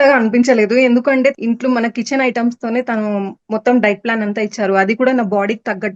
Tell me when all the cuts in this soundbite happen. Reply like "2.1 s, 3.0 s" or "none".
1.4 s